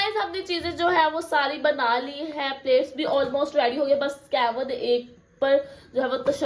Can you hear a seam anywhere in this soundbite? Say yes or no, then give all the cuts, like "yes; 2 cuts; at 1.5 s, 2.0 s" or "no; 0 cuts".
no; 0 cuts